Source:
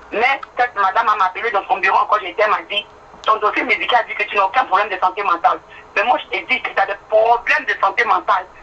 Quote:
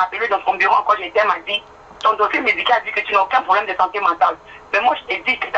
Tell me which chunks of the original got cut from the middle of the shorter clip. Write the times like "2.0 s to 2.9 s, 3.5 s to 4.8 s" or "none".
none